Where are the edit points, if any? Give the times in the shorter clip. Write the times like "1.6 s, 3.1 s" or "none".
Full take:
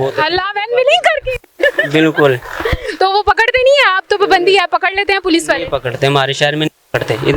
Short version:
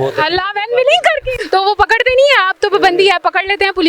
1.4 s